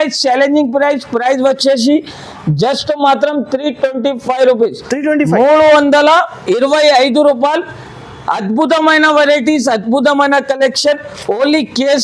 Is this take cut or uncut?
uncut